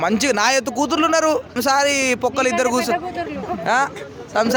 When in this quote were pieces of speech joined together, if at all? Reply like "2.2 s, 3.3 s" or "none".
1.6 s